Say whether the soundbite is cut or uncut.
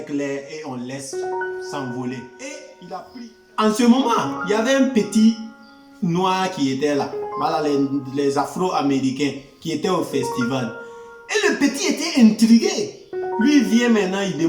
cut